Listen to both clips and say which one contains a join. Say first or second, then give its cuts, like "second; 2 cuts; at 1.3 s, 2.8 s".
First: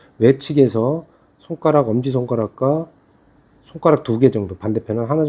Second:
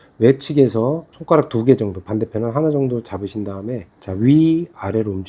second; 2 cuts; at 1.1 s, 3.9 s